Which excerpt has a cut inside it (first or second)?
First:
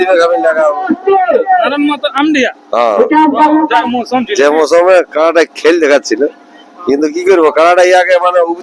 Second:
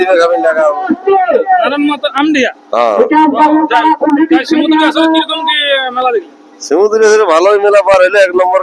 first